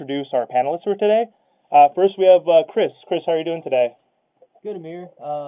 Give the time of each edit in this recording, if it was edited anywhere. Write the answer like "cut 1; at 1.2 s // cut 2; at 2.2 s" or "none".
cut 1; at 3.8 s